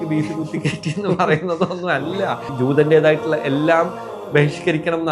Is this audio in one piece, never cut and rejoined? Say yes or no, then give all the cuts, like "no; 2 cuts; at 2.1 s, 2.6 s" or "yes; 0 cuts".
no; 1 cut; at 2.5 s